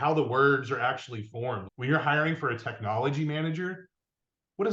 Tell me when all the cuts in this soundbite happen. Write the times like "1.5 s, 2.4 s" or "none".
1.7 s